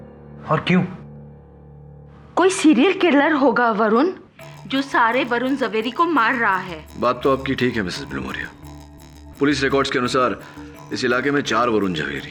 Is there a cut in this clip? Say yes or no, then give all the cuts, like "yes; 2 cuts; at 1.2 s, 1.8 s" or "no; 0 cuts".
no; 0 cuts